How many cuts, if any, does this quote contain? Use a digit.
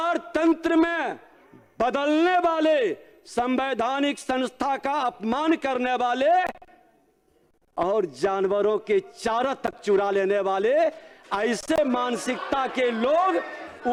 0